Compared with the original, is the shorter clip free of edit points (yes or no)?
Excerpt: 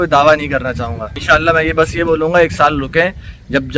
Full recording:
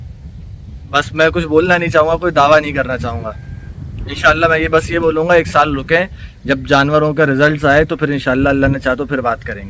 no